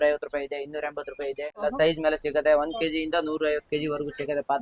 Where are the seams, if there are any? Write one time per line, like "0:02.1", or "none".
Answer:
0:01.6

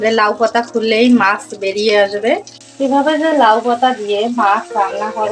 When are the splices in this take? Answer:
0:02.6

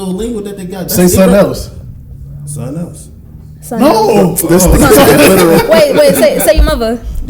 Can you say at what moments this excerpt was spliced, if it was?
none

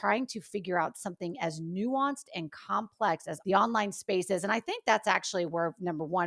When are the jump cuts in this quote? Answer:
0:03.3

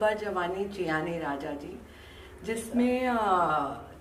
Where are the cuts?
none

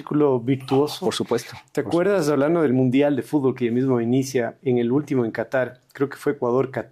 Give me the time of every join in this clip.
none

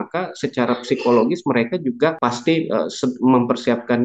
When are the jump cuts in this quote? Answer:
0:02.2

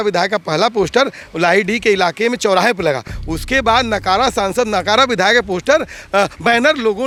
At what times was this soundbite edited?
none

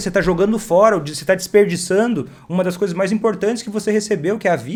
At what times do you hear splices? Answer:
none

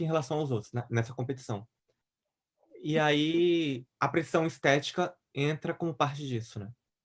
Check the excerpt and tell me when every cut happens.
none

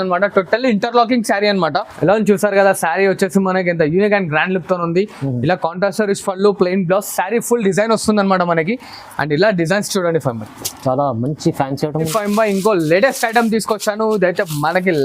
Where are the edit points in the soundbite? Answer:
0:01.9
0:12.1

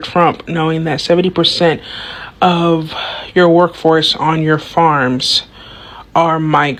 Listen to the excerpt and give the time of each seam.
none

